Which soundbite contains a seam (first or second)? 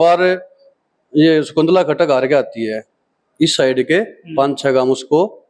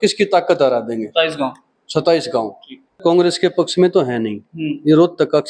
second